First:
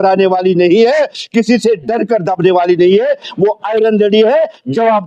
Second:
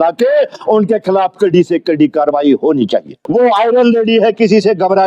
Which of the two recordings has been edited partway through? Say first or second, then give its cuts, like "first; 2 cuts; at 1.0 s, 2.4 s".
second; 1 cut; at 3.1 s